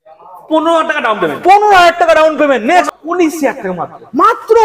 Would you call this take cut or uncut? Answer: cut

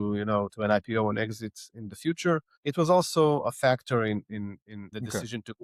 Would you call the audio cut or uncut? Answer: uncut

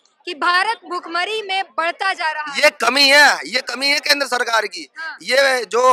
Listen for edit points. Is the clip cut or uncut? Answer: uncut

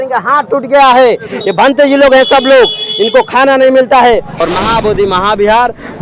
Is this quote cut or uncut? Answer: cut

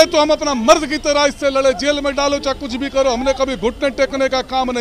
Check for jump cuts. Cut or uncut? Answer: uncut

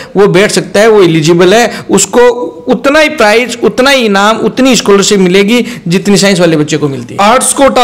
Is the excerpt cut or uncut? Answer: uncut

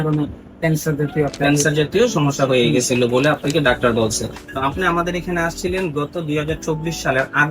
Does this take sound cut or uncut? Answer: cut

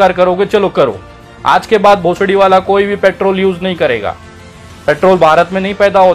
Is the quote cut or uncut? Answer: uncut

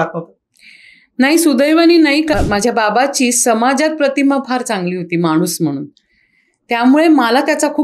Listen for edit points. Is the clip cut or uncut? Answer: cut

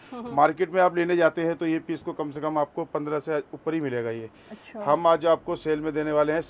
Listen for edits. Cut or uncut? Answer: uncut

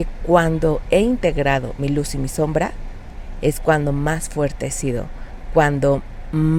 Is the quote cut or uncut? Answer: uncut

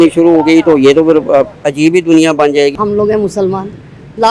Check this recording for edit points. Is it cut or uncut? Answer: cut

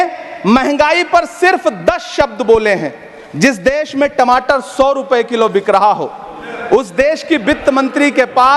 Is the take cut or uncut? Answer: uncut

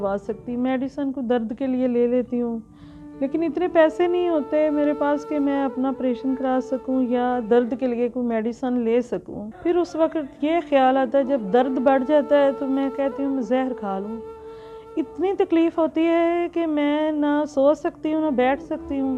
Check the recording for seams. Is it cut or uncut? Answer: uncut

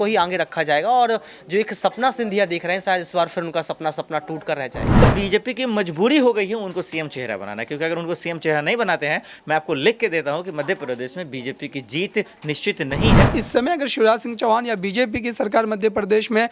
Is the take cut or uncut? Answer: cut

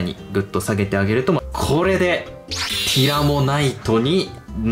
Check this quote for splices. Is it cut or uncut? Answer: cut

